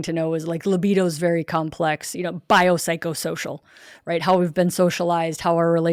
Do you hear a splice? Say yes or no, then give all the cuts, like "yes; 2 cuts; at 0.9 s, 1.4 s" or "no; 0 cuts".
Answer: no; 0 cuts